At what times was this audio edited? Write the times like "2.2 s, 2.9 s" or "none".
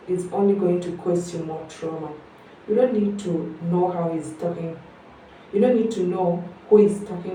none